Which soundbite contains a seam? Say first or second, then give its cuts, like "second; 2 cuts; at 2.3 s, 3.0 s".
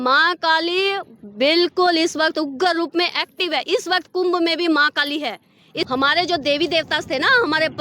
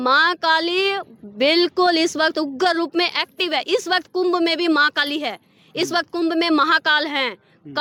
first; 1 cut; at 5.8 s